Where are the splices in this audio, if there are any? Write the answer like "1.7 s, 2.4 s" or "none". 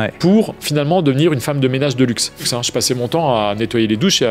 2.5 s